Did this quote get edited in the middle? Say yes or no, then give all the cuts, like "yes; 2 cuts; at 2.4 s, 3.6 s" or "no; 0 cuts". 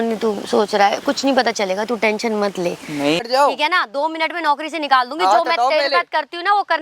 yes; 1 cut; at 3.2 s